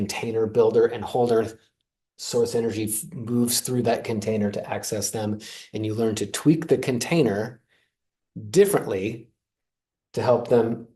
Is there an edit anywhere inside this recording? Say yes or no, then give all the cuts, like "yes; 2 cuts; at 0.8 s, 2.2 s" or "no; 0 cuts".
no; 0 cuts